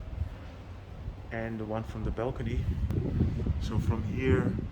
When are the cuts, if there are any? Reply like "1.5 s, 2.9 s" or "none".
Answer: 2.9 s